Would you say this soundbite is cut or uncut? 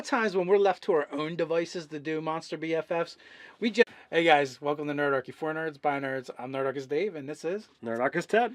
uncut